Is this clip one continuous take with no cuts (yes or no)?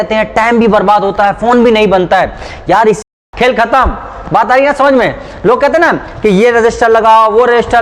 no